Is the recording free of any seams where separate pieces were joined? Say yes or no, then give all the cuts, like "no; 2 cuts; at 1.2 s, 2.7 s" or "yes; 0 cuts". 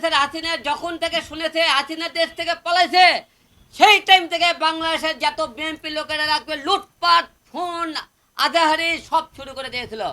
yes; 0 cuts